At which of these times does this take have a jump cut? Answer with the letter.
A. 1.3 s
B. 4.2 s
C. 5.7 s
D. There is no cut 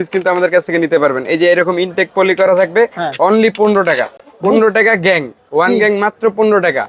D